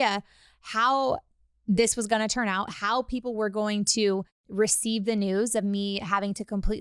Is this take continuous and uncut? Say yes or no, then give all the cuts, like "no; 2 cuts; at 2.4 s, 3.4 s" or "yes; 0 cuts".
yes; 0 cuts